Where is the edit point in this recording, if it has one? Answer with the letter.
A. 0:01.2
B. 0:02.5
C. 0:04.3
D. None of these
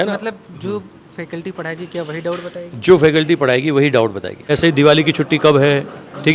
C